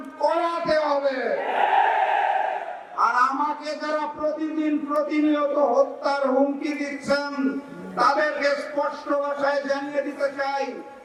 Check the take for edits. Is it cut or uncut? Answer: uncut